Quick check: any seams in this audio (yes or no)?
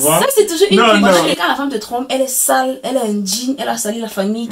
yes